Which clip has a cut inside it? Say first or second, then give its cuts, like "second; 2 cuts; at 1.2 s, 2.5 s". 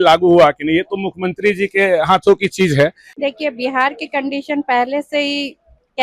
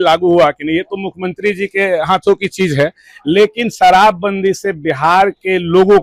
first; 1 cut; at 3.1 s